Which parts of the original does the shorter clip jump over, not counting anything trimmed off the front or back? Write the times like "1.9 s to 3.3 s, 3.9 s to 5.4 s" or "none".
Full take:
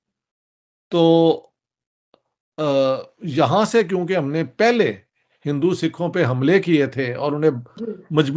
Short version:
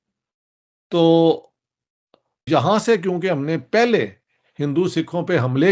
2.3 s to 3.2 s